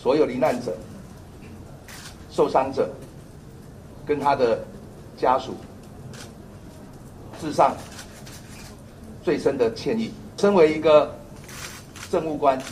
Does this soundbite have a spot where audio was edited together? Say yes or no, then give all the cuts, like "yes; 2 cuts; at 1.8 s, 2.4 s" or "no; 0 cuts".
yes; 1 cut; at 10.4 s